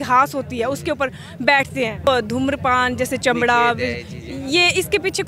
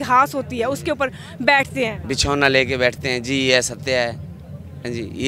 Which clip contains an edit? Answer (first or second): first